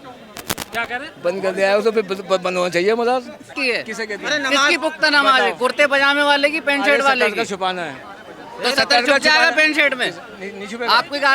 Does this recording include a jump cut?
yes; 1 cut; at 3.5 s

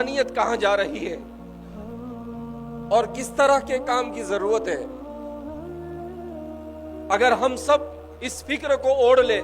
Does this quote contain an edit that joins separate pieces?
yes; 4 cuts; at 1.2 s, 2.6 s, 4.9 s, 7.1 s

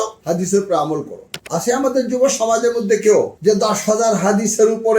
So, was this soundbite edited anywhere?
no; 0 cuts

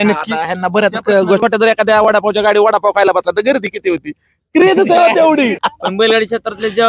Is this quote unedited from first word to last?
no; 2 cuts; at 1.4 s, 5.6 s

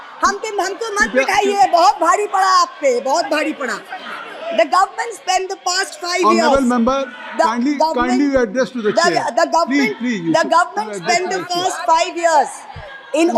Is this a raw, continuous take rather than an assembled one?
yes; 0 cuts

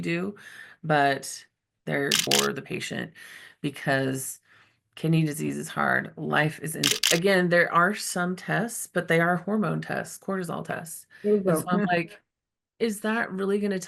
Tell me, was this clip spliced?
yes; 2 cuts; at 2.3 s, 7.0 s

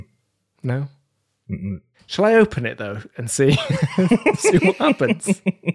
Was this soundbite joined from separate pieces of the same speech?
no; 0 cuts

